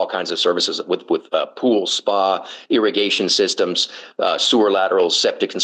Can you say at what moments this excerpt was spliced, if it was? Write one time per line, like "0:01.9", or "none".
none